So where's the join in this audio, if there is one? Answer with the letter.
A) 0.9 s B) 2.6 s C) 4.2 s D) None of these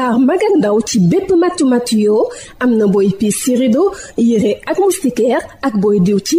D